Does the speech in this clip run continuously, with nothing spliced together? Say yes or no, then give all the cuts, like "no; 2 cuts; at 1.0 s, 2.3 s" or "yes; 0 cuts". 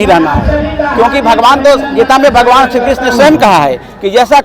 yes; 0 cuts